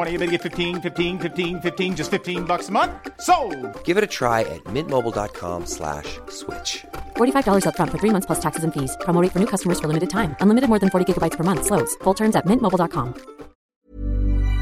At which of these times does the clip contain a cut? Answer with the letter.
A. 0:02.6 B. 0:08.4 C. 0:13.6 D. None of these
C